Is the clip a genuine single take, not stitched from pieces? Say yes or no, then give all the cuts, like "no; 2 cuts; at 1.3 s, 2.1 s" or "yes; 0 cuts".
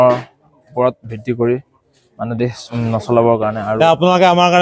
no; 2 cuts; at 2.6 s, 3.7 s